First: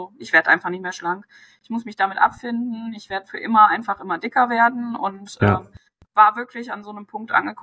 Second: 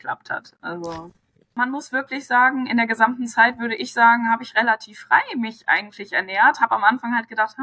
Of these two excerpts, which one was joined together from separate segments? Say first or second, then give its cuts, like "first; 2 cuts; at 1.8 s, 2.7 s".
second; 1 cut; at 1.5 s